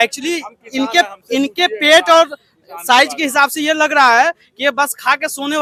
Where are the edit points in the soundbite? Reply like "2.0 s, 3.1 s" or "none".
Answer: none

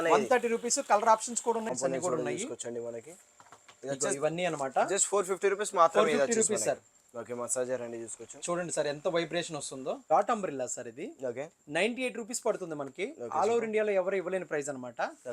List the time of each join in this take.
1.7 s, 10.0 s

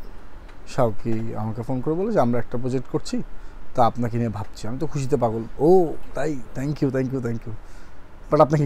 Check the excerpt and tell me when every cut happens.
none

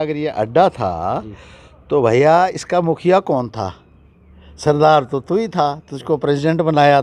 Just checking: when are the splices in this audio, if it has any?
none

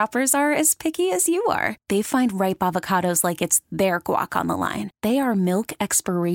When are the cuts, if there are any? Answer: none

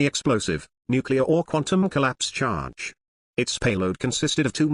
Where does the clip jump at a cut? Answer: none

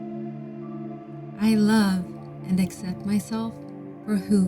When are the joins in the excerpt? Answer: 1.3 s

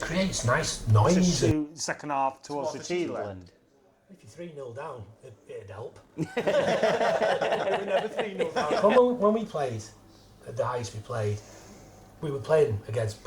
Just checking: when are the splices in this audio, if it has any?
1.4 s, 8.8 s

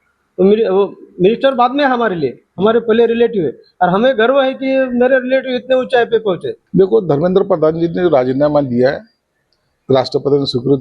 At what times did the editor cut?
6.5 s

